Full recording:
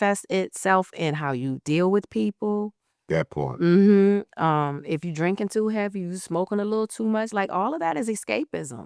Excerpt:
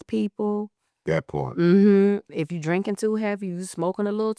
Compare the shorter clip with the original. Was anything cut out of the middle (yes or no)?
yes